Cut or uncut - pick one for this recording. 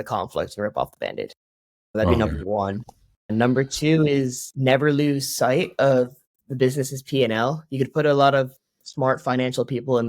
cut